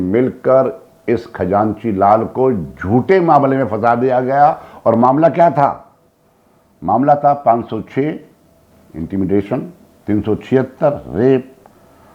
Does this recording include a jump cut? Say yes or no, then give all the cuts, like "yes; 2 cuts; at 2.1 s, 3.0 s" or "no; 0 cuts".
no; 0 cuts